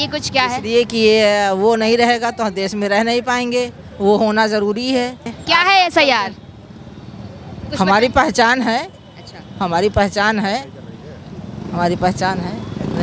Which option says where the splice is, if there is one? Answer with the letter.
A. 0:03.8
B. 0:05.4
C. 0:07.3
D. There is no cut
B